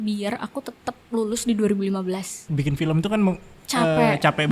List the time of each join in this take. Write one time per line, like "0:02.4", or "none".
0:02.4